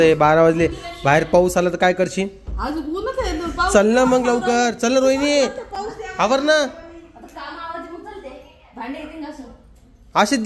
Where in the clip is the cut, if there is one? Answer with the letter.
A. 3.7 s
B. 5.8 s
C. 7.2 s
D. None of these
D